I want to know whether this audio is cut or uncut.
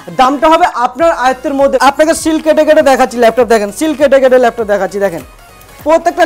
cut